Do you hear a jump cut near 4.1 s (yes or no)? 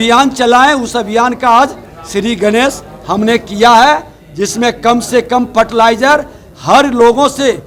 no